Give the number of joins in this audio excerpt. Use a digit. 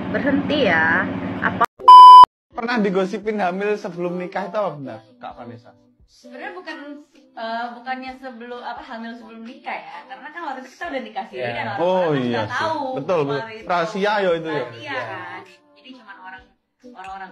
2